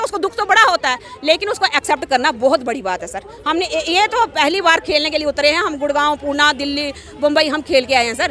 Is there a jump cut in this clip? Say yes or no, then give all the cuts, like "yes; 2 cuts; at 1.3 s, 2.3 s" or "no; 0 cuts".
no; 0 cuts